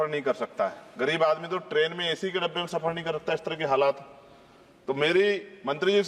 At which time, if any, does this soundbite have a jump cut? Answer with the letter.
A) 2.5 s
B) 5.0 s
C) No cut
C